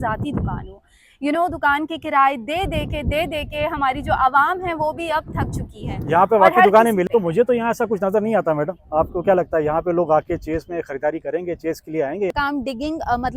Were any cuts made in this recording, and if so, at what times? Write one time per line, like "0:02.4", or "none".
0:07.0
0:12.3